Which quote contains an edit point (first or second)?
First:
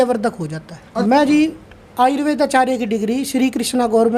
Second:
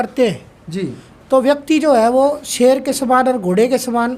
first